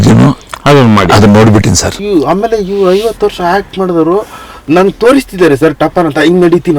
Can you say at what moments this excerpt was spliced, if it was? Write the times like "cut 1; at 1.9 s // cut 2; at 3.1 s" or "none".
cut 1; at 2.0 s